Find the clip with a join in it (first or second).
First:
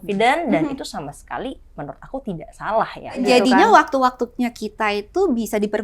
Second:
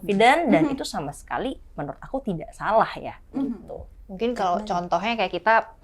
first